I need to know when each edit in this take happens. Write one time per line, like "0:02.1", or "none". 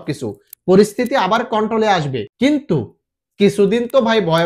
0:02.2